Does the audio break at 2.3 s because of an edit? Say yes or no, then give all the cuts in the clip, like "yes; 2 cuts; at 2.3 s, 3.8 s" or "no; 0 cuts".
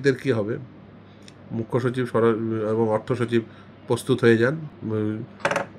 no; 1 cut; at 4.7 s